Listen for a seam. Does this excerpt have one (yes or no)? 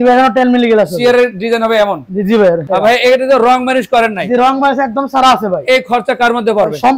yes